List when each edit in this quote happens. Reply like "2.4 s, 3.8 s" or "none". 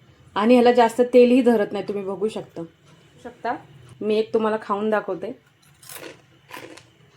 3.4 s